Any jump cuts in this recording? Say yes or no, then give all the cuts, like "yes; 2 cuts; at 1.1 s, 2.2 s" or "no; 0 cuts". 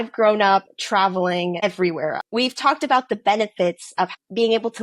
yes; 1 cut; at 2.2 s